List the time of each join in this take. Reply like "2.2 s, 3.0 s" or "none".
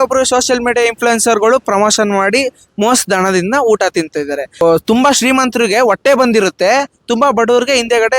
4.4 s